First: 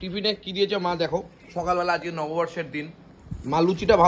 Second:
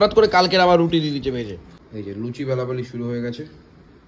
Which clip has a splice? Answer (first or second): second